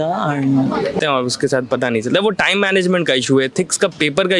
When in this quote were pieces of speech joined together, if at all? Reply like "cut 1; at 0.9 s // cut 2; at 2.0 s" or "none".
cut 1; at 1.0 s